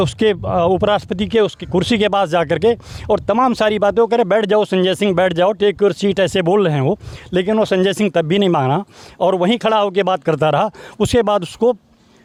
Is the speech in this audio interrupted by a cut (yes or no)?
no